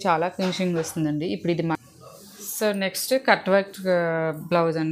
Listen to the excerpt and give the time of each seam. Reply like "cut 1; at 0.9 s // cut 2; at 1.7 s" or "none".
cut 1; at 1.8 s

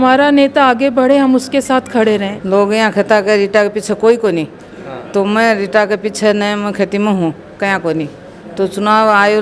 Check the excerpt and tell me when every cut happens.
cut 1; at 2.3 s

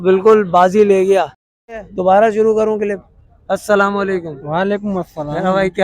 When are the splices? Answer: cut 1; at 1.4 s

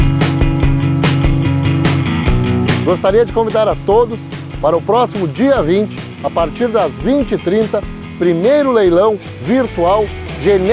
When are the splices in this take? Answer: cut 1; at 2.8 s

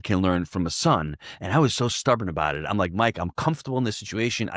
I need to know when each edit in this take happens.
none

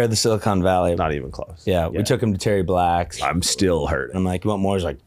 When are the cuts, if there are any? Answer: cut 1; at 1.0 s // cut 2; at 3.1 s // cut 3; at 4.1 s

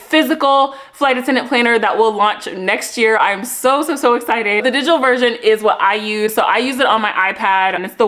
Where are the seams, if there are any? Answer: none

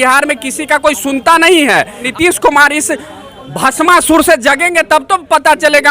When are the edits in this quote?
cut 1; at 2.1 s

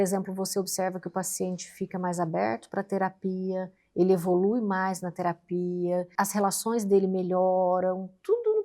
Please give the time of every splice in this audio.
cut 1; at 6.1 s

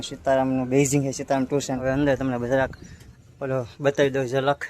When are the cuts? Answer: cut 1; at 1.7 s

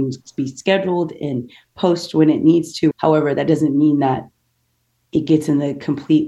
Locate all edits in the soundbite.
cut 1; at 2.9 s

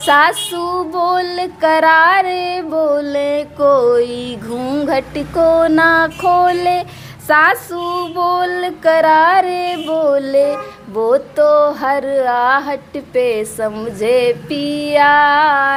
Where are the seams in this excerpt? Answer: none

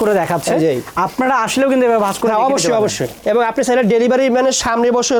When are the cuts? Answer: none

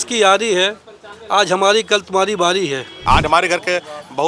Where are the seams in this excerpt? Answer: cut 1; at 3.0 s

